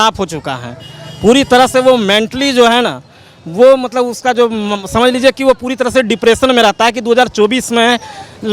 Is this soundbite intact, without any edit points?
yes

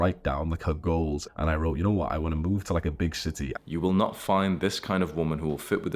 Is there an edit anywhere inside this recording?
yes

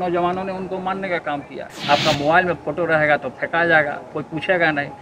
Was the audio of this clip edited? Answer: yes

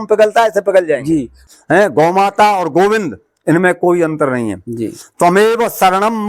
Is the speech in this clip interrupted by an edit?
yes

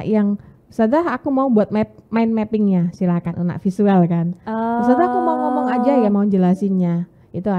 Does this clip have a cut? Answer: no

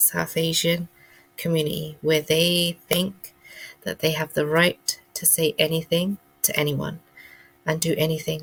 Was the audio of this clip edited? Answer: no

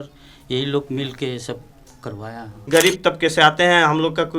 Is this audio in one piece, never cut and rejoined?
no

